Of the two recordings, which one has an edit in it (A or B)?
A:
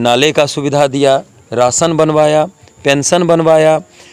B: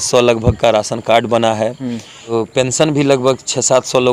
B